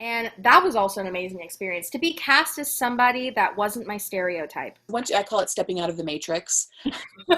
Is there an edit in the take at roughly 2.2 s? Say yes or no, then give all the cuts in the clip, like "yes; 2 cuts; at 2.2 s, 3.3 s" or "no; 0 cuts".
no; 1 cut; at 4.8 s